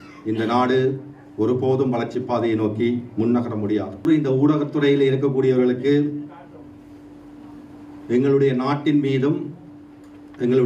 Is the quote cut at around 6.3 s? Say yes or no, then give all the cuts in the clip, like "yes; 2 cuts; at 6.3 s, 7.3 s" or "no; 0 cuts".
no; 1 cut; at 4.0 s